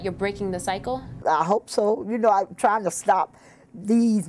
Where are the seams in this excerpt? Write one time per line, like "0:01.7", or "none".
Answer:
0:01.1